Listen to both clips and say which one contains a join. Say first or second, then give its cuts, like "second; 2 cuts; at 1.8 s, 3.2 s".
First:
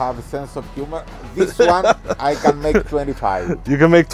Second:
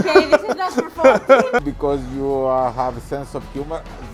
second; 1 cut; at 1.6 s